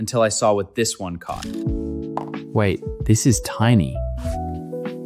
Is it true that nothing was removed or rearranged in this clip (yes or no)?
no